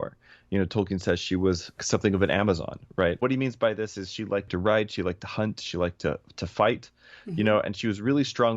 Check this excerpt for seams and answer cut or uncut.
cut